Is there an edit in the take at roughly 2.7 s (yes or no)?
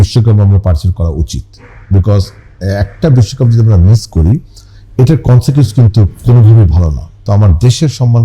no